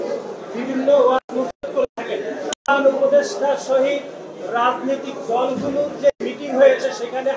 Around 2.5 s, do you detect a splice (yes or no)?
yes